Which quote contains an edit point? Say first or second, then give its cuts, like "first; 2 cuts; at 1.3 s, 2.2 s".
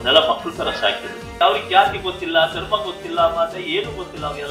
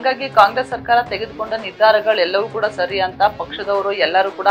first; 1 cut; at 1.3 s